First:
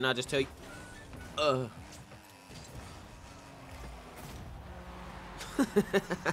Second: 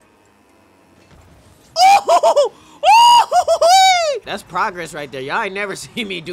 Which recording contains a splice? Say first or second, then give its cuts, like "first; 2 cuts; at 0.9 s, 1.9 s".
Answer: second; 1 cut; at 4.2 s